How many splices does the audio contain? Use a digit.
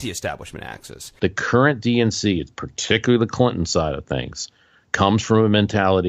1